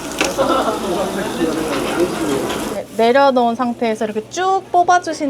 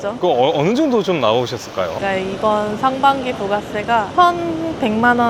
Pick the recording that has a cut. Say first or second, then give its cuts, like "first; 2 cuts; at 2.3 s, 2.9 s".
first; 1 cut; at 2.8 s